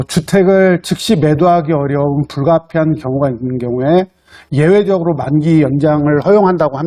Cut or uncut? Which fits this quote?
uncut